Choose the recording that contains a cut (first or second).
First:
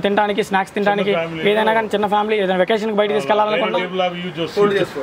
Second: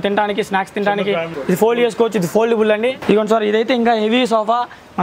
second